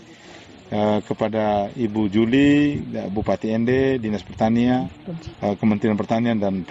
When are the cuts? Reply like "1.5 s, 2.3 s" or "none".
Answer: 4.8 s